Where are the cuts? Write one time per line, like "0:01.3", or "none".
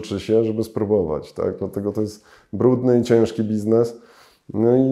none